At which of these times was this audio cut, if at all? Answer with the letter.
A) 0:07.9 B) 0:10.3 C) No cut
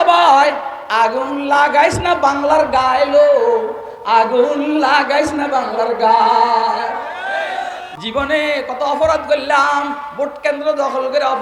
A